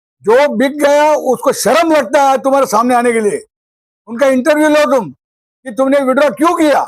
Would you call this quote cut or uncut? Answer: uncut